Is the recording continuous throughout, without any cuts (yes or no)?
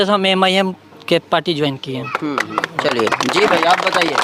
yes